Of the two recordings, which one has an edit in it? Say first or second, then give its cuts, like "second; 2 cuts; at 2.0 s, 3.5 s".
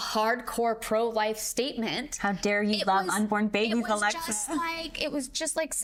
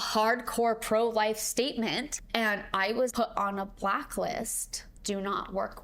second; 3 cuts; at 2.1 s, 3.1 s, 4.9 s